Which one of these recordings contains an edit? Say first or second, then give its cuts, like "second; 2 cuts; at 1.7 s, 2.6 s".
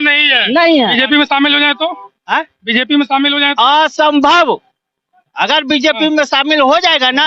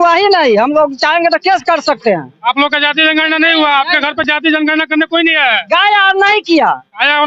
first; 1 cut; at 0.9 s